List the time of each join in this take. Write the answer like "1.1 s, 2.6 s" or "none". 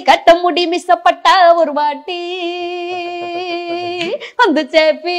none